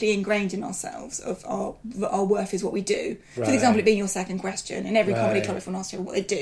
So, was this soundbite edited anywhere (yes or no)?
no